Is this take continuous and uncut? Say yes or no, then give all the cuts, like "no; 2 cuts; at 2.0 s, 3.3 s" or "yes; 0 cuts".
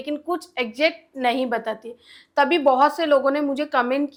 yes; 0 cuts